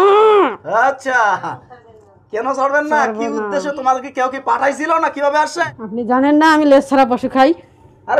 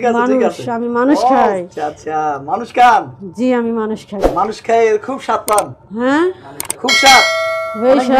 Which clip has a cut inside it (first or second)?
first